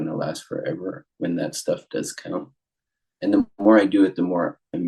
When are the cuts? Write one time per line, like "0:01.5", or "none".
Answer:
none